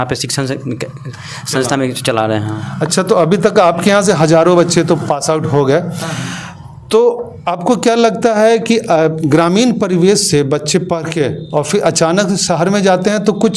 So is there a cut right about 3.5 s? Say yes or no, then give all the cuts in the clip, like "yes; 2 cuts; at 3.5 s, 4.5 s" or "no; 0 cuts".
no; 0 cuts